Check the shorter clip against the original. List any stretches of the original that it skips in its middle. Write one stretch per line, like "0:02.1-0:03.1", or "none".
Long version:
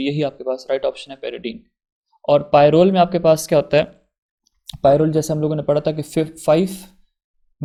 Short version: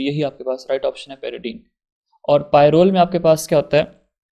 none

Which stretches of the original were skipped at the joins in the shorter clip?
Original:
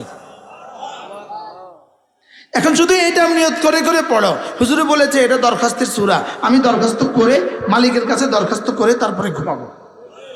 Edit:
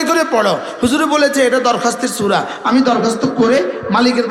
none

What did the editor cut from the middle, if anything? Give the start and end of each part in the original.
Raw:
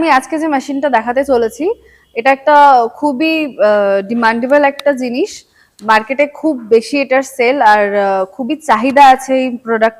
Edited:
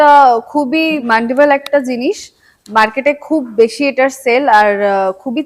0:03.5-0:04.2

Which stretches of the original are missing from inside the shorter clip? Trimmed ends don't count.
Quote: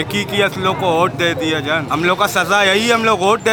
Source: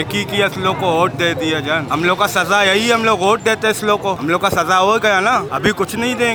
none

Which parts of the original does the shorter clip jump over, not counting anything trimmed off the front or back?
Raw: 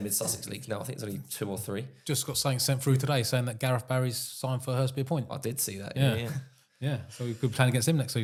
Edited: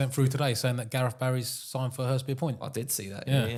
none

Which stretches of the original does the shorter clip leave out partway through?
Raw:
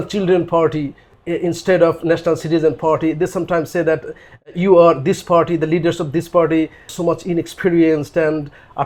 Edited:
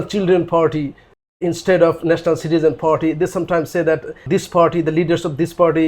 0:04.2-0:05.0

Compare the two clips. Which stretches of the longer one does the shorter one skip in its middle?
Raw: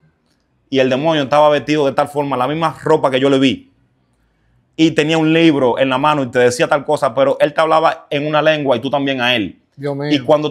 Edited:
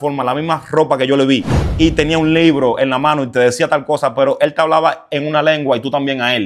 0:03.7-0:04.6

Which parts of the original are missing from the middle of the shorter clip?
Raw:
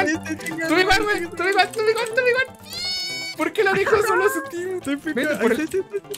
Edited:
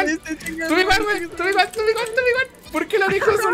0:02.6-0:03.2

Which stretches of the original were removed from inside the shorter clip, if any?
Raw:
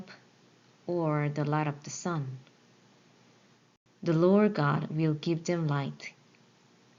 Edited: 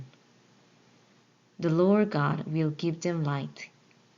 0:03.7-0:03.8

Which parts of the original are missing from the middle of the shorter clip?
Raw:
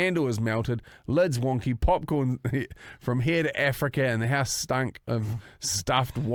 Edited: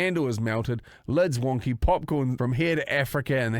0:02.4-0:03.0

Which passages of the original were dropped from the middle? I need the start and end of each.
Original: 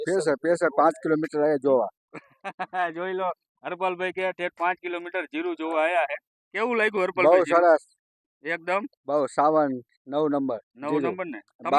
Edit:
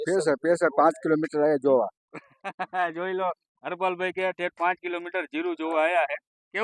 none

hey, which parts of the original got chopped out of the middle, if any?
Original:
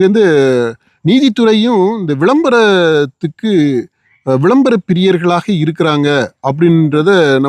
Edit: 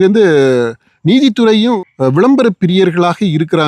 0:01.8-0:04.0

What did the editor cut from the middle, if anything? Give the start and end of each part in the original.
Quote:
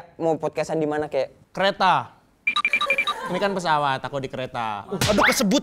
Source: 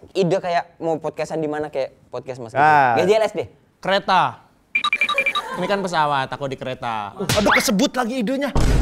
0:02.0-0:03.7

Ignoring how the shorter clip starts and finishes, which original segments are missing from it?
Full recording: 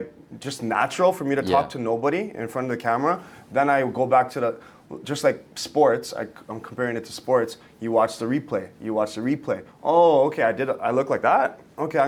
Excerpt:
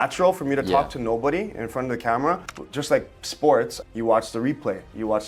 0:03.3-0:04.9
0:06.1-0:07.7

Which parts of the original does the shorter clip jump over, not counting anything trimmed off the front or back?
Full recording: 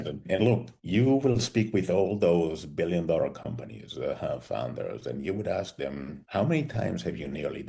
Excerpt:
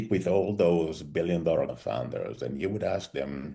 0:03.4-0:04.4

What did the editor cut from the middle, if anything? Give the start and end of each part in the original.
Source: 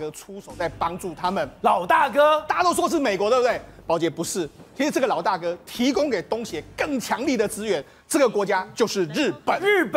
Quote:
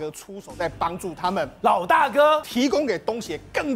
0:02.5-0:05.7

